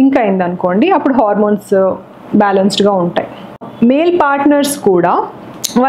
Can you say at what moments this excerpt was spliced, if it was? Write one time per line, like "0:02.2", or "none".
0:03.7